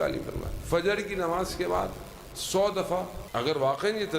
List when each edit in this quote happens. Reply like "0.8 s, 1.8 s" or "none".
3.2 s